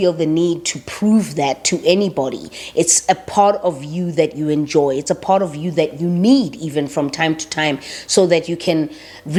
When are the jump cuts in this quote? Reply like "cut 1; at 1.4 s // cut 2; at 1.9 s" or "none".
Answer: none